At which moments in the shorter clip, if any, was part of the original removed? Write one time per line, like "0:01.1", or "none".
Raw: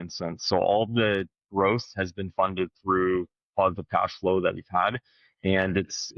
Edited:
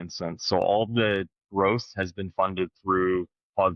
none